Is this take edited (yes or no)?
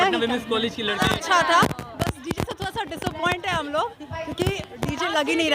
yes